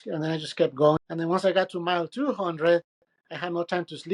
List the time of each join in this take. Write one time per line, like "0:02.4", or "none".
0:01.0